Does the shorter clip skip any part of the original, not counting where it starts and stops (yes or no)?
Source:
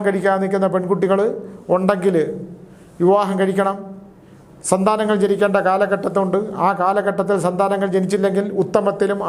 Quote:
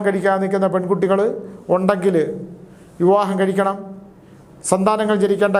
no